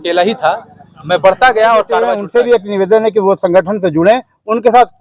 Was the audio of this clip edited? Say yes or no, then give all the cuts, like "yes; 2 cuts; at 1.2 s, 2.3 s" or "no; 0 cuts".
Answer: yes; 1 cut; at 2.2 s